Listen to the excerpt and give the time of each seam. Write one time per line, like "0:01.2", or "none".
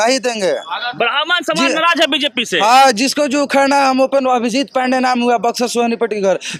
none